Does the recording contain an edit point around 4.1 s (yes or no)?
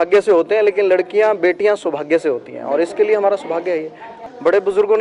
yes